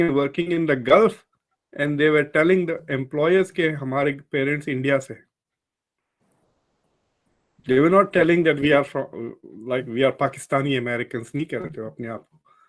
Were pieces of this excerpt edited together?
no; 0 cuts

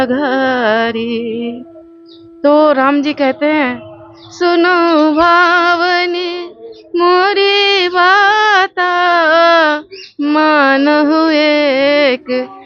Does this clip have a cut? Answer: no; 0 cuts

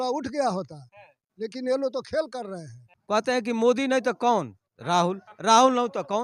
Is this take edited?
no; 0 cuts

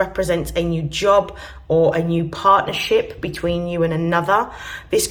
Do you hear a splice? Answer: no; 0 cuts

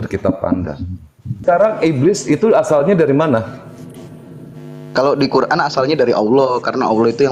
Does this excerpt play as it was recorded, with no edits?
no; 1 cut; at 1.4 s

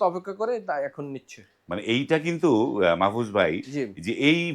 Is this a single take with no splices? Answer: yes; 0 cuts

